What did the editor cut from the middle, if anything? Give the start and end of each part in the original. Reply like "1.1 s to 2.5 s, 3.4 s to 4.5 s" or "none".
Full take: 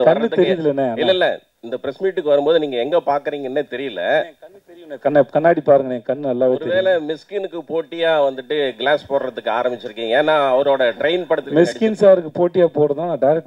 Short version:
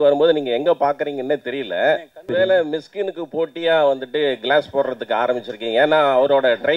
4.5 s to 6.6 s